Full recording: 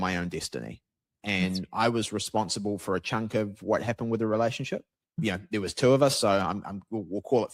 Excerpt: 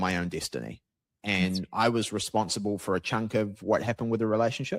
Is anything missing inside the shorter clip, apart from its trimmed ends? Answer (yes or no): no